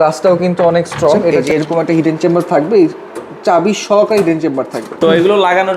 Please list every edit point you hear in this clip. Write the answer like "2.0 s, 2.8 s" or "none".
1.3 s, 4.9 s